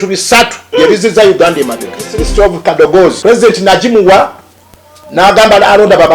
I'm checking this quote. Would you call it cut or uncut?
cut